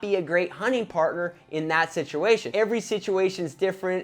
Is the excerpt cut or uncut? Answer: cut